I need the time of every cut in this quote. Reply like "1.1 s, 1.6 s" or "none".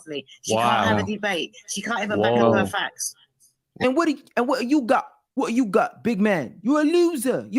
3.7 s